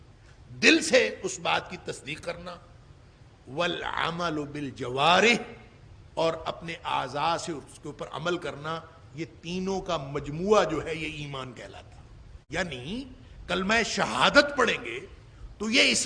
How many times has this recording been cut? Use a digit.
1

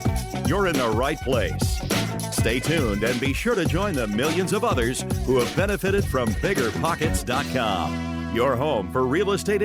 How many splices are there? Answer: 0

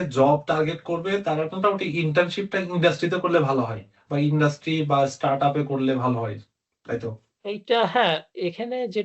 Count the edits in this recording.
0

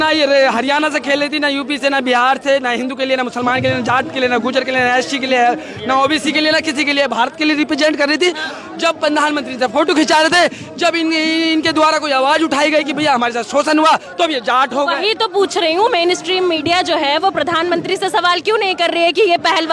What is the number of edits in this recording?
0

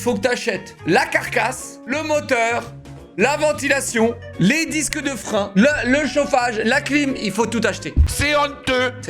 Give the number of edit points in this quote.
2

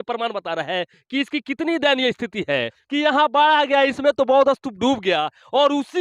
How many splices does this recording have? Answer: 1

